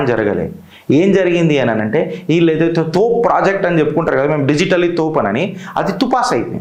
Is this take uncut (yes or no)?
yes